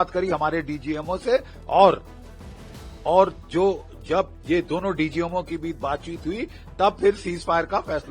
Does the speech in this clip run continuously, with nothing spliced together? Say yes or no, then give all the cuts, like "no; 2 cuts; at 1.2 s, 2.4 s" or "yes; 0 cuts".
yes; 0 cuts